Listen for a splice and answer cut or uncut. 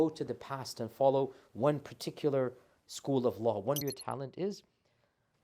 cut